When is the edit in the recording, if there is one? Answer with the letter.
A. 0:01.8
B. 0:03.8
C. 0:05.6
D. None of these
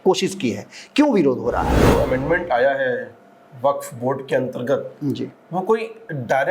A